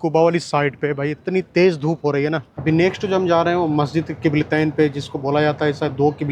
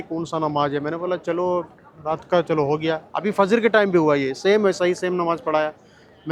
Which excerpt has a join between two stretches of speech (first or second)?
first